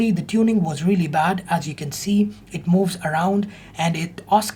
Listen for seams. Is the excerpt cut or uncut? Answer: uncut